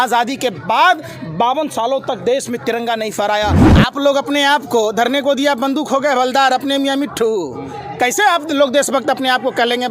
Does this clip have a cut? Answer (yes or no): yes